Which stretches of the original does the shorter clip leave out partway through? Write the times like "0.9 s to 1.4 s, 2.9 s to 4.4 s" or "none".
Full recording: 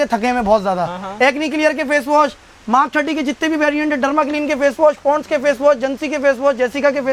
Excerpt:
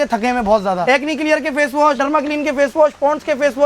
0.8 s to 1.1 s, 2.3 s to 4.0 s